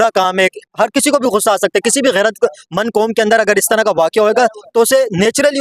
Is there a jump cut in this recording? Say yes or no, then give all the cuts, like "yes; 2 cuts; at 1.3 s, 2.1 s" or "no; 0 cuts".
no; 0 cuts